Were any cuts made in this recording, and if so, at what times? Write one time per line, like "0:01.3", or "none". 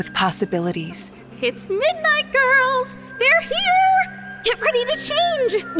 none